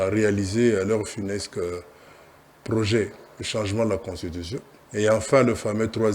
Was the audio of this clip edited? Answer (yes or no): yes